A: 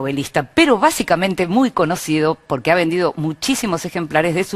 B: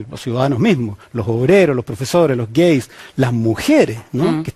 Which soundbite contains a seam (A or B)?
A